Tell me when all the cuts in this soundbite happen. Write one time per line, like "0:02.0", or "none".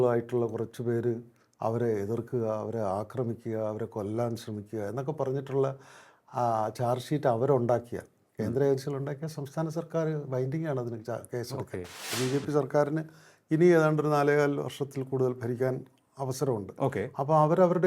0:12.1